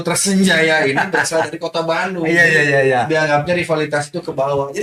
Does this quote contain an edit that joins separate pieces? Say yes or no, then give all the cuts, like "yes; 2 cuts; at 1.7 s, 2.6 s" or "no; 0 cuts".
no; 0 cuts